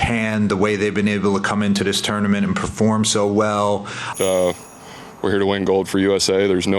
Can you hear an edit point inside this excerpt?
yes; 1 cut; at 4.0 s

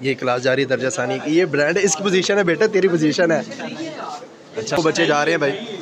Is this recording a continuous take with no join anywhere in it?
no; 1 cut; at 4.8 s

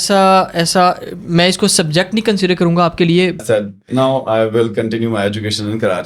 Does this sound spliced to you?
yes; 1 cut; at 3.4 s

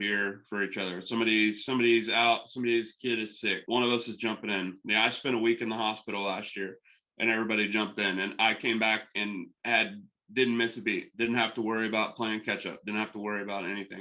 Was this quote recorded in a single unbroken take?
no; 1 cut; at 3.6 s

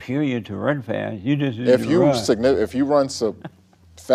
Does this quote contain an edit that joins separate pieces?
no; 0 cuts

